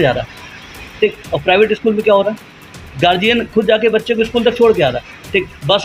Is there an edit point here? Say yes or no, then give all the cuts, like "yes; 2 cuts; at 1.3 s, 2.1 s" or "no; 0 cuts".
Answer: no; 0 cuts